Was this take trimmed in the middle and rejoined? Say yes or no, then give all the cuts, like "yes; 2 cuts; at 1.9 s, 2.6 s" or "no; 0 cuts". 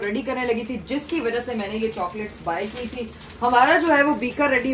no; 0 cuts